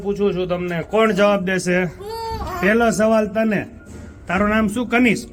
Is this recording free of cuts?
yes; 0 cuts

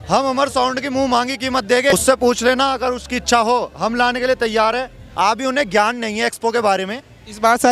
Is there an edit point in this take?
yes; 2 cuts; at 1.9 s, 5.0 s

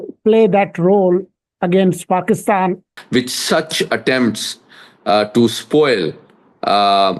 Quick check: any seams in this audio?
yes; 1 cut; at 2.9 s

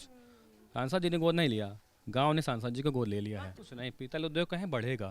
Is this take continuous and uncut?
no; 1 cut; at 3.5 s

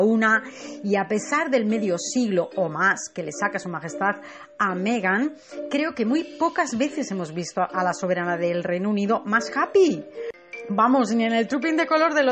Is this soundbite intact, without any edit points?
no; 1 cut; at 3.8 s

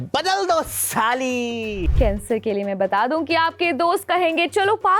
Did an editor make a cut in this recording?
yes; 1 cut; at 1.9 s

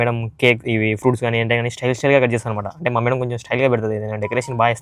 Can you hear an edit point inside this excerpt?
no; 0 cuts

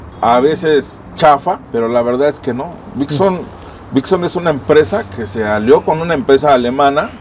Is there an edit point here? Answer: no; 0 cuts

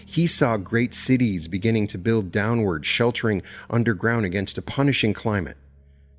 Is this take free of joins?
yes; 0 cuts

